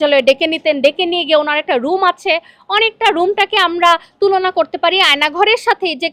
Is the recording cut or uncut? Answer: uncut